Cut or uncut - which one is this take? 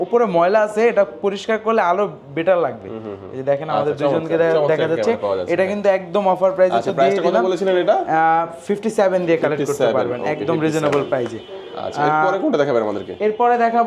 uncut